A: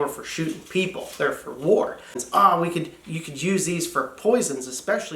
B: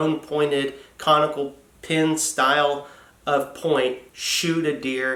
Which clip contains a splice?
A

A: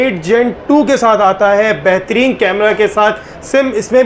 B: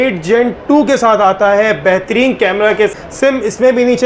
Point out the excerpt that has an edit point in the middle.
B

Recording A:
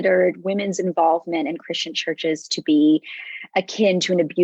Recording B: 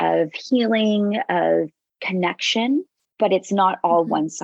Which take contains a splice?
B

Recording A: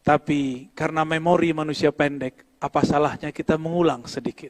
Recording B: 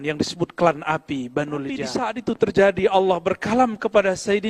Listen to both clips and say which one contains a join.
B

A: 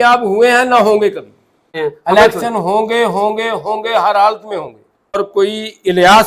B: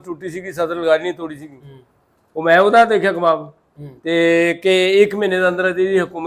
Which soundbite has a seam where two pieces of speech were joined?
A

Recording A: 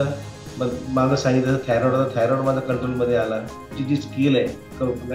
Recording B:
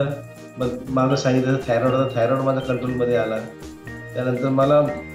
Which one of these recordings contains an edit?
A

